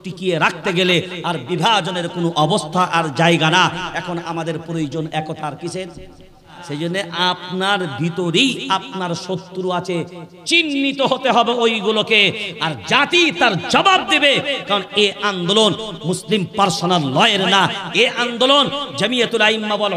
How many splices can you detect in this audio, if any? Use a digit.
1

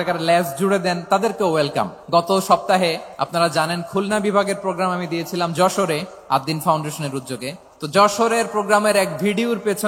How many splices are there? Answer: 4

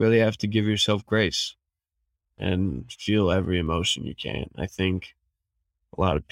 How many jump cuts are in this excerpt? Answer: 0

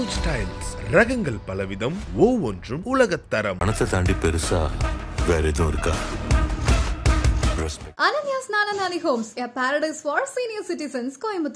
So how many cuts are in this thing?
0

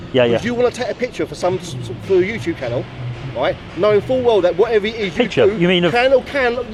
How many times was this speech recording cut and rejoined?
0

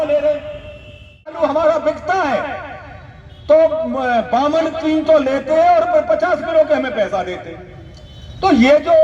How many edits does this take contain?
1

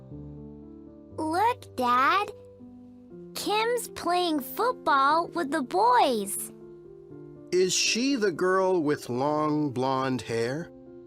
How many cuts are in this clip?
1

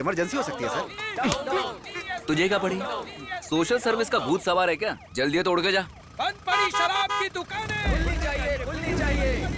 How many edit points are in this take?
1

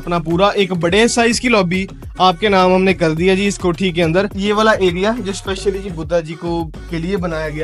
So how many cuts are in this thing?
1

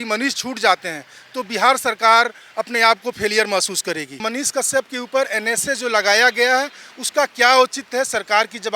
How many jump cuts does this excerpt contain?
1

